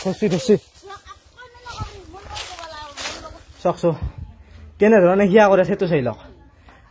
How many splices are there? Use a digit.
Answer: 1